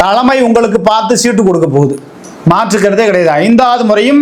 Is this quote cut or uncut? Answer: uncut